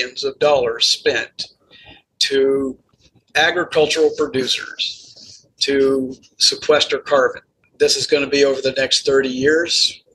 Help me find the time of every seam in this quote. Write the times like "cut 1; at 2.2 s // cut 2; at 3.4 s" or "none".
cut 1; at 7.7 s